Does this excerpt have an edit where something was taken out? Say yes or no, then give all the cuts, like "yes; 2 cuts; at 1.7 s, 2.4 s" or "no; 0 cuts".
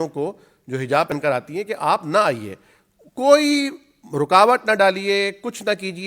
yes; 1 cut; at 1.1 s